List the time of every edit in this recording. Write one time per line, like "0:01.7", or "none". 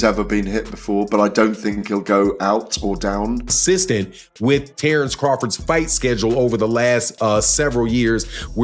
0:03.6

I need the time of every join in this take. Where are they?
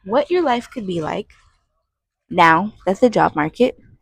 none

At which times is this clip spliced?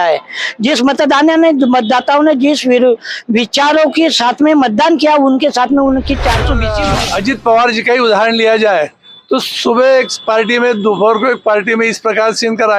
0:06.7

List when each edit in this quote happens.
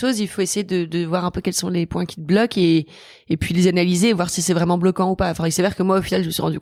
none

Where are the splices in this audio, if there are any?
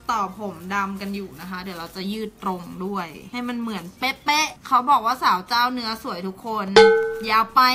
none

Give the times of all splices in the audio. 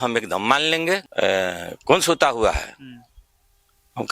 0:01.1

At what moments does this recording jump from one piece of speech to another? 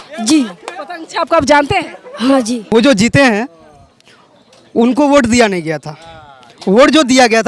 0:02.7

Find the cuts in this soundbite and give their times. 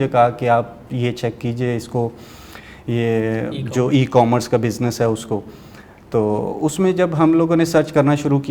none

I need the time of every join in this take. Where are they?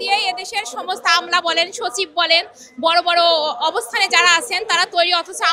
none

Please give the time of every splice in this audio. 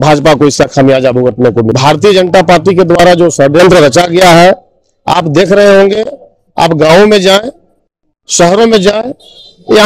0:01.7

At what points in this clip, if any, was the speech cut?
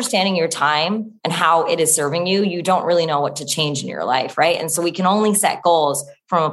0:01.1

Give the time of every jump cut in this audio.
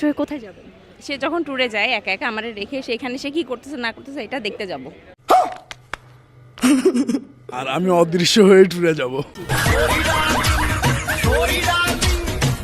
none

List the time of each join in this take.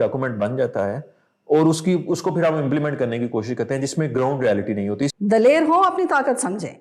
0:05.1

